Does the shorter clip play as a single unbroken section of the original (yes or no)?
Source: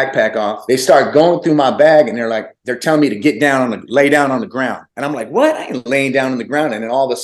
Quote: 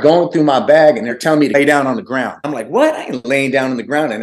no